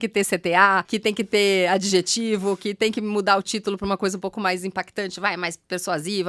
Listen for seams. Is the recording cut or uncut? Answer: cut